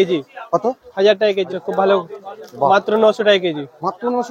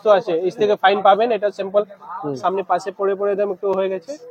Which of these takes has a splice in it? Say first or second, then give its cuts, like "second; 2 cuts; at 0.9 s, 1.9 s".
first; 1 cut; at 2.0 s